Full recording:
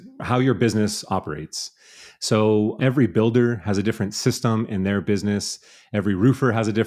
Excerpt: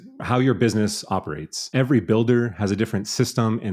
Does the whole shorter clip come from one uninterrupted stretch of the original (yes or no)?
no